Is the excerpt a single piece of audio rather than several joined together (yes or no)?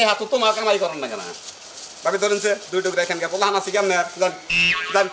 yes